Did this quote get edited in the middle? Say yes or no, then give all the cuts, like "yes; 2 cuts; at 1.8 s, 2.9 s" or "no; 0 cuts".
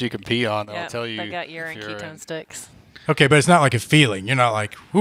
no; 0 cuts